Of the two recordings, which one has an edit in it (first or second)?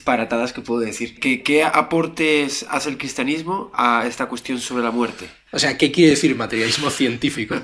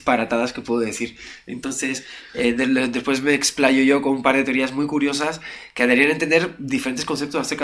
first